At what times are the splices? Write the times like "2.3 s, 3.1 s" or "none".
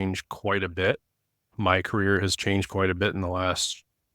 1.5 s